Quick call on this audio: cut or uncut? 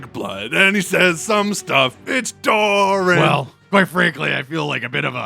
cut